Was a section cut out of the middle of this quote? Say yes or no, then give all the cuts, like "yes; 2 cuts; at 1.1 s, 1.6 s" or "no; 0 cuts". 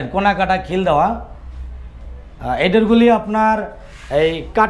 no; 0 cuts